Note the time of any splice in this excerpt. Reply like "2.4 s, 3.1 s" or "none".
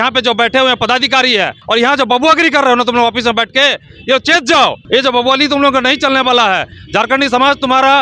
1.6 s, 4.8 s